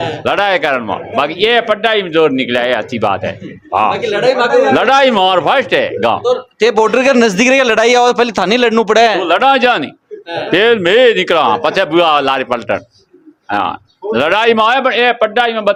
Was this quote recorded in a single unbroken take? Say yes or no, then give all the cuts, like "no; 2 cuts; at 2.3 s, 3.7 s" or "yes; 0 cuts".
yes; 0 cuts